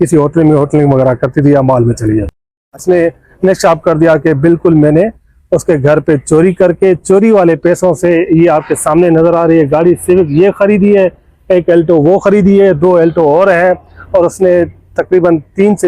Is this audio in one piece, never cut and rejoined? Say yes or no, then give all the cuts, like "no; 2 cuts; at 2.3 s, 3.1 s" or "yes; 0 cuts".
no; 1 cut; at 2.8 s